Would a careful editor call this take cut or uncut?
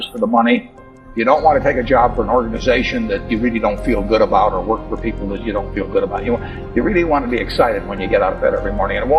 uncut